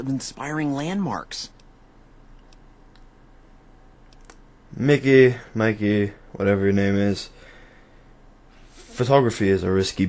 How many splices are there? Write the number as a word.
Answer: one